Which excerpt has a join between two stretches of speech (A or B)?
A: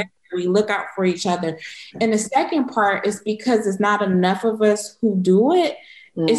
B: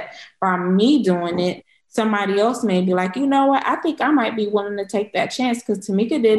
A